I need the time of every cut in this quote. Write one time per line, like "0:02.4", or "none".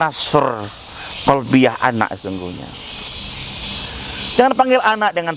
0:03.1